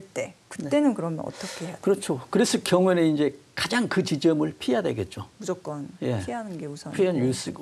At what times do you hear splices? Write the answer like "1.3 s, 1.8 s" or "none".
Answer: none